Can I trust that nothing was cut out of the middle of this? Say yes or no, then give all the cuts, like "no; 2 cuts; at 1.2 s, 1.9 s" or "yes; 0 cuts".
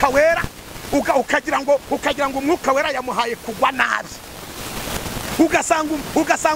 no; 1 cut; at 5.3 s